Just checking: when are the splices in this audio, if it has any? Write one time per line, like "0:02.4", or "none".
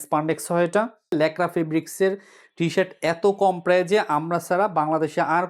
0:01.1